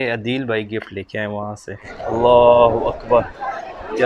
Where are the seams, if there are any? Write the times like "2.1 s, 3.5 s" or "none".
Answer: 1.9 s